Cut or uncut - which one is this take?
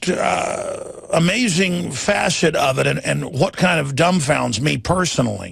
uncut